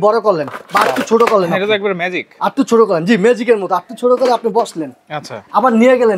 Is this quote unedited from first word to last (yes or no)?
yes